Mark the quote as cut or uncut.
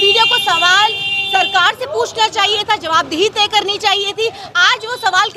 uncut